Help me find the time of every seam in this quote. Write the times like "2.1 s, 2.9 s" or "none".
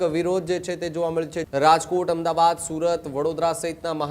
1.4 s